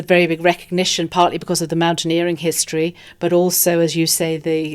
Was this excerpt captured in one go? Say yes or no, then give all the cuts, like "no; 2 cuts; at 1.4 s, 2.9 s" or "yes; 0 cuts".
yes; 0 cuts